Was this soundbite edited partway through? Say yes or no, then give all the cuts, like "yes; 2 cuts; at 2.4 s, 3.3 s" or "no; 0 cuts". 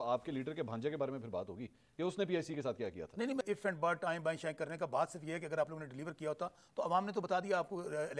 yes; 1 cut; at 3.4 s